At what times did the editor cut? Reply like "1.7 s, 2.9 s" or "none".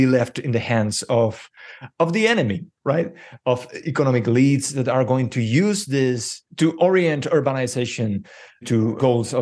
6.4 s, 8.7 s